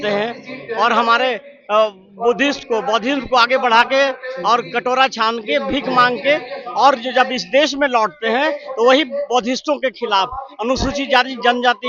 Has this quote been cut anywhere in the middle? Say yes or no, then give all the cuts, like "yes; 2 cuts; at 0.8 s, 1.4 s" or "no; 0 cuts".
no; 0 cuts